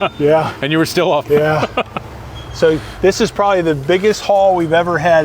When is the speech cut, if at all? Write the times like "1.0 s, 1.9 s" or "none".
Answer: 1.2 s